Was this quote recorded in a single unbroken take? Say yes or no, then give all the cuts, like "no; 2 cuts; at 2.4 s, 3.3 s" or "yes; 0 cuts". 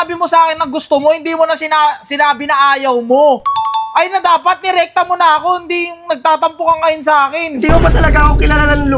yes; 0 cuts